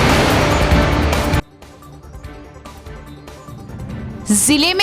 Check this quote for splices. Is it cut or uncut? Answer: cut